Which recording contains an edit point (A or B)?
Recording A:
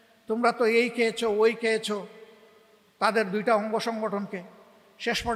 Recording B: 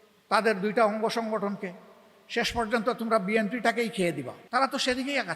B